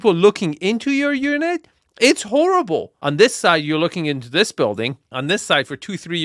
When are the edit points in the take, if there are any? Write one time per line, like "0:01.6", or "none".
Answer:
0:03.0
0:05.1